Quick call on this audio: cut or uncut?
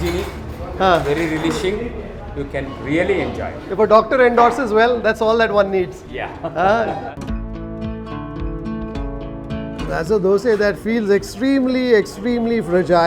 cut